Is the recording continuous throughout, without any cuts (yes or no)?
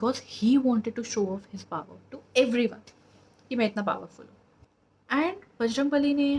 yes